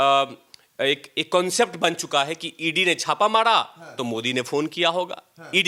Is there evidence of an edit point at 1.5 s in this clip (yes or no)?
no